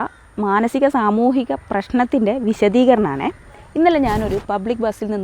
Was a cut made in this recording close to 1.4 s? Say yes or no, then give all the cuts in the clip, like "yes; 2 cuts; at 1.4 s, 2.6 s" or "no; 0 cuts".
no; 1 cut; at 3.9 s